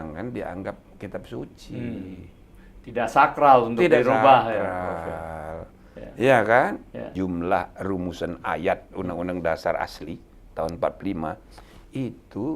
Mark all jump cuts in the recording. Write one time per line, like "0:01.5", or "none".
0:07.0

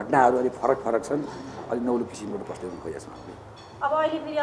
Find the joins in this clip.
none

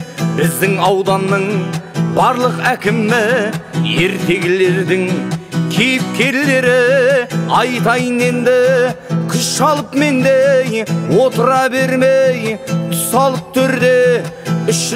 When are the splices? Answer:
none

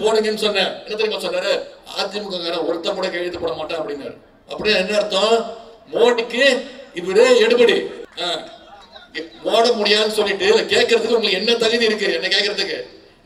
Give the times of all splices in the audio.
0:08.1

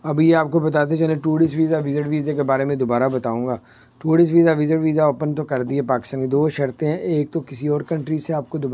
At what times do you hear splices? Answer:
none

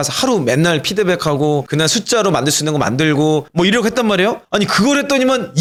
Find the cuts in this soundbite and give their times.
none

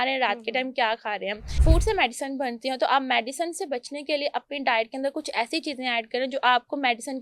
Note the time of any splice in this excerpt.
0:01.5

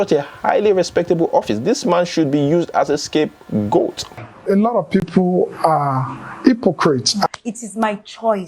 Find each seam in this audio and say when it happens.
0:04.3
0:07.3

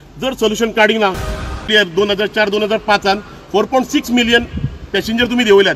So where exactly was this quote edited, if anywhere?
0:01.5

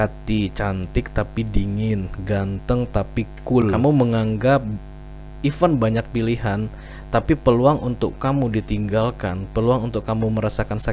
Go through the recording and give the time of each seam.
0:03.7

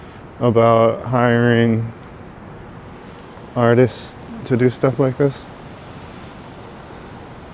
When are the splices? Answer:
none

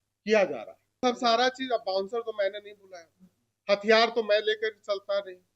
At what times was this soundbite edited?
0:01.0

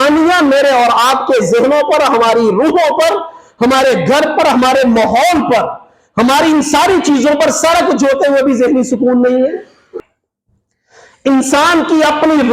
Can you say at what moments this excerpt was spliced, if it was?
0:10.0

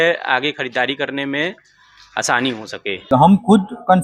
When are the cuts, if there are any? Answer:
0:03.1

